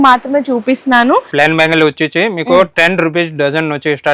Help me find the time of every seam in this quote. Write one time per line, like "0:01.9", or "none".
0:01.3